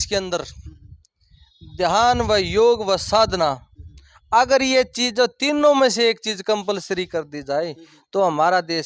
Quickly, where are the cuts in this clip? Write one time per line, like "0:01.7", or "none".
none